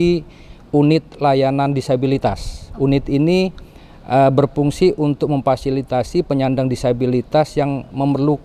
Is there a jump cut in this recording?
no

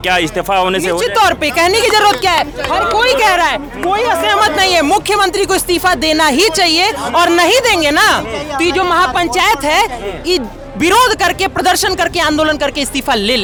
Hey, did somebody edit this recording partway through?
no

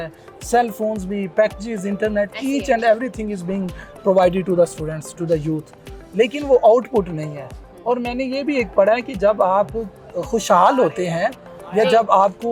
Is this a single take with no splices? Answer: yes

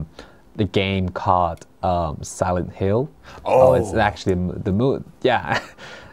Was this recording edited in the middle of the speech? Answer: no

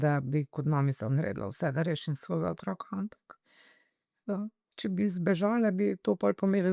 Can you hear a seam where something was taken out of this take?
no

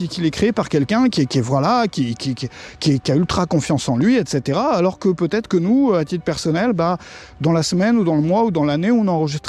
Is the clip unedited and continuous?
yes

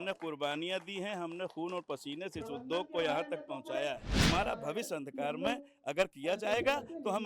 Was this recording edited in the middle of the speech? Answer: yes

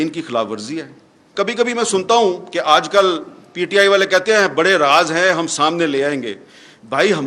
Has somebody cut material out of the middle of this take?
yes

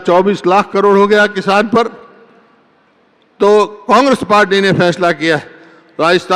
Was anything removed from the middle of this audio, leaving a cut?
no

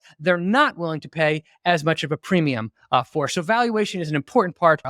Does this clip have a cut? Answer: no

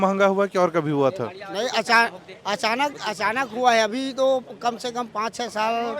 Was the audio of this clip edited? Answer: no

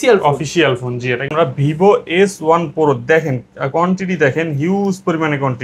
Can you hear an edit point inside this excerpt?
yes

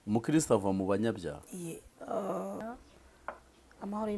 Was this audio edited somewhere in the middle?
yes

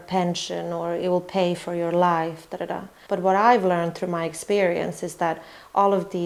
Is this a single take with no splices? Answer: yes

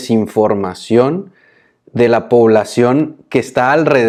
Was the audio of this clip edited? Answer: no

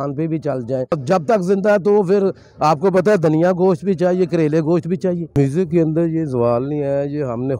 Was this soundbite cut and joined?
yes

